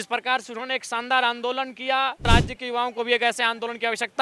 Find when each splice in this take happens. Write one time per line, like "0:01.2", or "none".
0:02.3

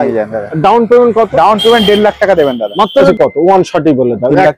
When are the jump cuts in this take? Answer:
0:03.1

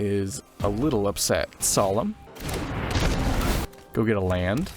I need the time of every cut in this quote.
0:01.7
0:02.3
0:03.7

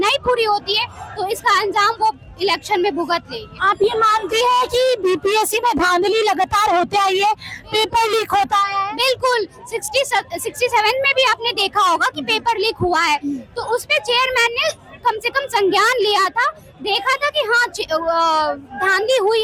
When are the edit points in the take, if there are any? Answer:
none

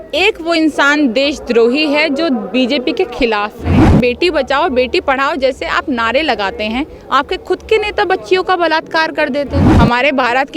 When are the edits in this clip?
0:03.7
0:09.7

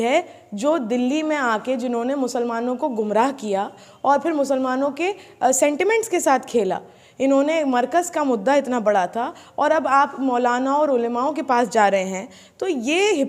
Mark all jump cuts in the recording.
none

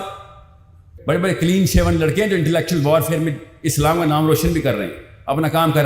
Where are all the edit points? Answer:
0:00.9

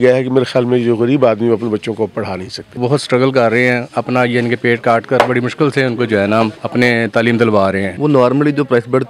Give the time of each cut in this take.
0:02.8
0:06.6
0:07.9

